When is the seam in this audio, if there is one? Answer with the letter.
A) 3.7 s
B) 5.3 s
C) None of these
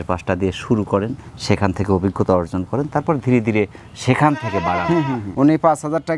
B